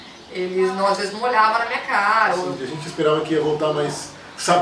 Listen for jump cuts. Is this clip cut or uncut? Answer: cut